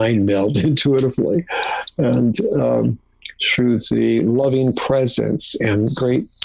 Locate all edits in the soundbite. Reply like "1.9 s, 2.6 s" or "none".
none